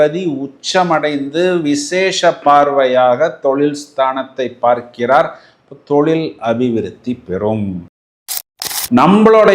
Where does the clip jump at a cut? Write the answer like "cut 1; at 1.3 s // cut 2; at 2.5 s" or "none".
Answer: cut 1; at 8.2 s